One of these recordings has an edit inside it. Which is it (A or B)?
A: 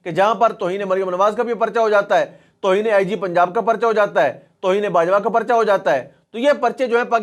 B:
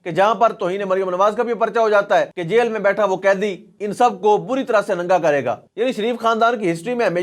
B